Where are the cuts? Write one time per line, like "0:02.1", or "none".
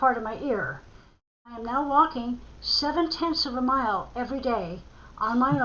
0:01.5